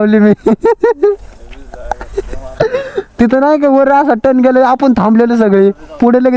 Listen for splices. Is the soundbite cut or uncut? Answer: uncut